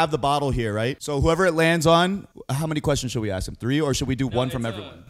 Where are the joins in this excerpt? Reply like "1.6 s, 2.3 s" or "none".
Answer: 1.0 s, 2.4 s